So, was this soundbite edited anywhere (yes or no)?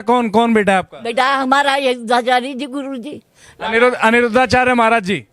no